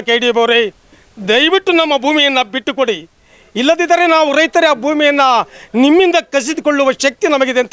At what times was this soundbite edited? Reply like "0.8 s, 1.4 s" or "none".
none